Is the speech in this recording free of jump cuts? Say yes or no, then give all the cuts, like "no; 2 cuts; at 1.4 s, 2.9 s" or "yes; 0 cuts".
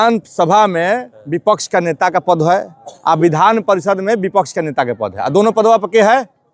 yes; 0 cuts